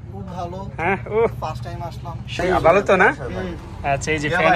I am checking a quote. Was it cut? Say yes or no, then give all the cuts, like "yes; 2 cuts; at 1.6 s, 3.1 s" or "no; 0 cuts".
yes; 1 cut; at 2.4 s